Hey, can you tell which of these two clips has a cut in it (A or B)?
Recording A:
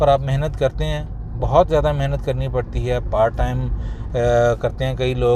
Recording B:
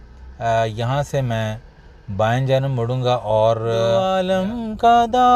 B